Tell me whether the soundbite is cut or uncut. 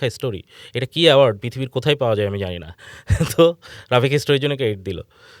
uncut